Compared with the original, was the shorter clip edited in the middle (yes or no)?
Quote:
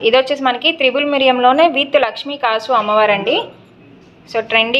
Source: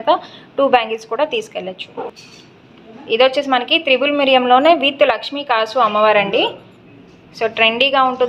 no